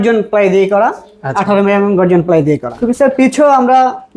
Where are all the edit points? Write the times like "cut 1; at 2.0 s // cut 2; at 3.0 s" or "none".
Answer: cut 1; at 2.7 s

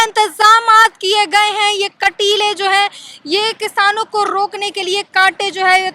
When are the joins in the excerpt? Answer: none

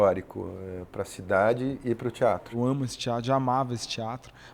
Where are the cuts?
cut 1; at 2.5 s

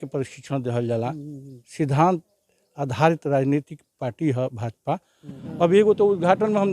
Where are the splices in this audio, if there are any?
cut 1; at 5.4 s

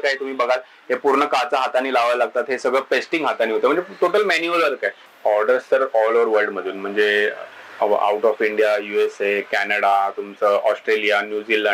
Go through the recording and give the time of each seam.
cut 1; at 5.0 s

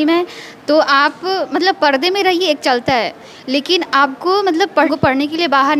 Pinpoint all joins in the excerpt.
cut 1; at 4.9 s

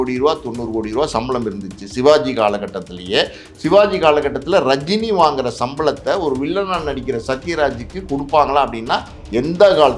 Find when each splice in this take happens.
none

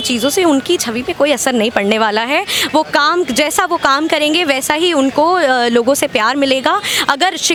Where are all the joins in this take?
none

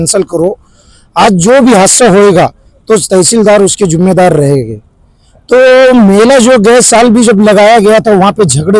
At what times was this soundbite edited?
none

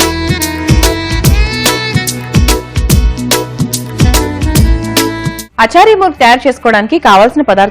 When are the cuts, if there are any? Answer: cut 1; at 5.4 s

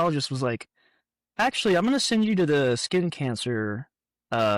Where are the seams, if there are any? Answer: none

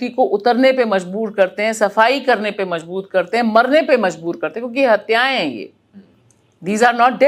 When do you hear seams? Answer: none

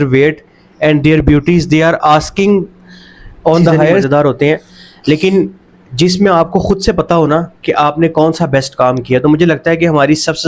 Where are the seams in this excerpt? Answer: cut 1; at 4.1 s

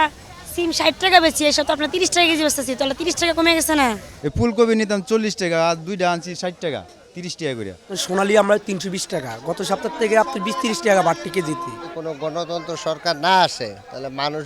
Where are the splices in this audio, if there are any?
cut 1; at 4.0 s // cut 2; at 8.0 s // cut 3; at 11.6 s

